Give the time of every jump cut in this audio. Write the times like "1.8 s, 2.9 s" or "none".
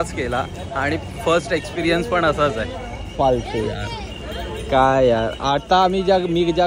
none

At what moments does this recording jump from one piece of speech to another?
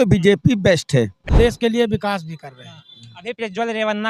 1.3 s

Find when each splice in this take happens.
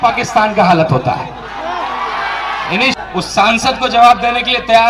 2.9 s

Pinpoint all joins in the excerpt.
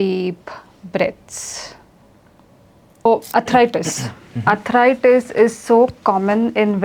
3.1 s

